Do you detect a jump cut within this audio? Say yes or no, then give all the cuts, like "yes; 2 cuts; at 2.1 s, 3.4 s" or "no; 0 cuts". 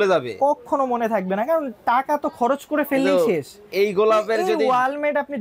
no; 0 cuts